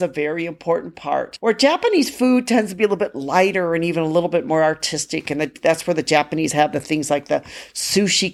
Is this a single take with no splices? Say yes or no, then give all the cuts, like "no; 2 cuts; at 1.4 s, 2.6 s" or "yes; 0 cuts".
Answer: no; 1 cut; at 1.3 s